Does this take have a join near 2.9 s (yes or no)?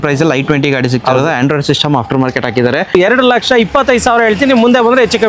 yes